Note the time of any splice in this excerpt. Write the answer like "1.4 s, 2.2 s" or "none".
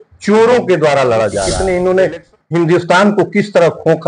1.5 s